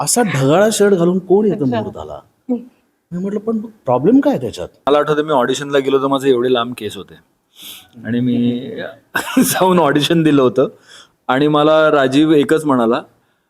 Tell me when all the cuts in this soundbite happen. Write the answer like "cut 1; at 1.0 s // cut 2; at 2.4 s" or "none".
cut 1; at 4.9 s